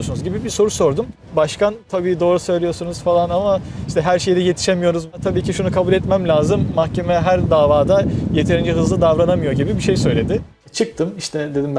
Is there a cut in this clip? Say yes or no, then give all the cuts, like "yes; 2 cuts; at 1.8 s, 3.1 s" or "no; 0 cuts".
yes; 2 cuts; at 1.2 s, 10.6 s